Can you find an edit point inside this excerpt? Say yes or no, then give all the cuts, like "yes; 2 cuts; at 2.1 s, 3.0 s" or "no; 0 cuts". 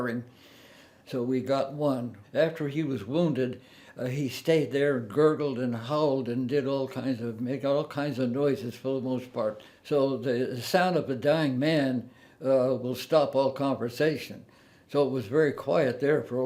yes; 2 cuts; at 2.2 s, 9.7 s